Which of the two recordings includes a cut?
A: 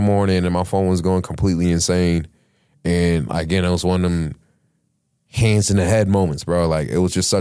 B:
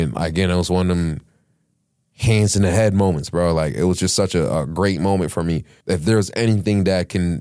B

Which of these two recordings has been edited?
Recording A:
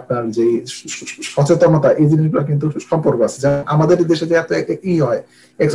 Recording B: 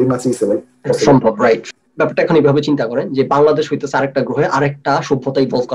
B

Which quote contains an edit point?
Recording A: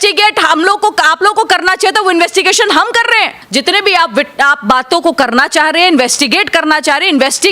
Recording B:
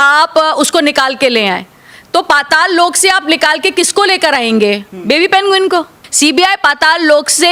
A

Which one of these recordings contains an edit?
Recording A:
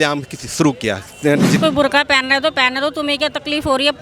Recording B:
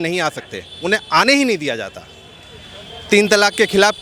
A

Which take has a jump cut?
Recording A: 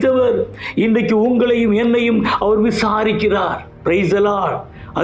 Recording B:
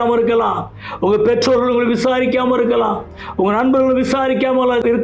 A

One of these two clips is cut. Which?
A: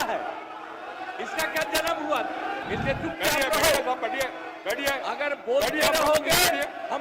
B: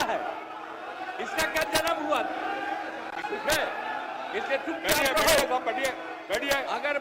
A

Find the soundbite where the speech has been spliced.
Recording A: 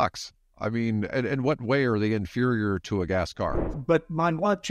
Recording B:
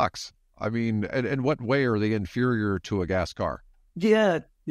A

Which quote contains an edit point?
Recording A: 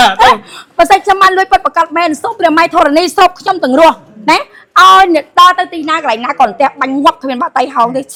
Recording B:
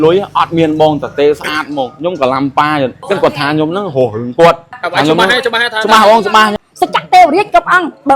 B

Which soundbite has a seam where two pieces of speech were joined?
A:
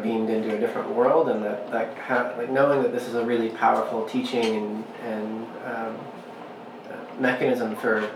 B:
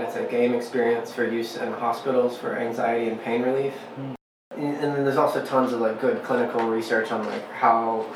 B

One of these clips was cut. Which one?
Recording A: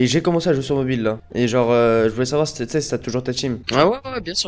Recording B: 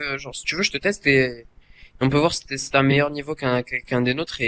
A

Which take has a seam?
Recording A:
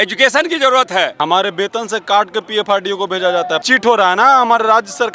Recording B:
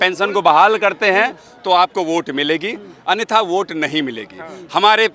A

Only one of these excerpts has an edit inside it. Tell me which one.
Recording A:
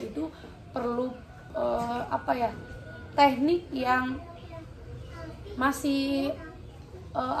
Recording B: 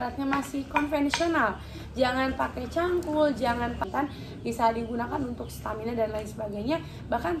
B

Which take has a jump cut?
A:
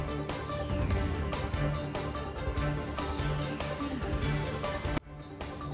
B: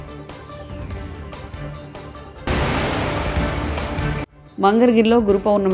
A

